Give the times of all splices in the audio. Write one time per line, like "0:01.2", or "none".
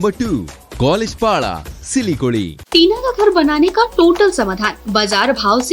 0:02.6

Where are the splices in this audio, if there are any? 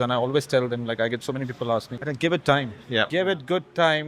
0:01.9
0:03.1

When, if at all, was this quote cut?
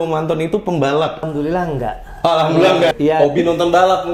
0:01.3
0:02.9

